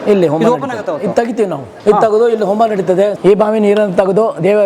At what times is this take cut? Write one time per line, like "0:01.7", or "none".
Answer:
0:01.7
0:03.1